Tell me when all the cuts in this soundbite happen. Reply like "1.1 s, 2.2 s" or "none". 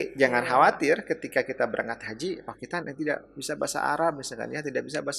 none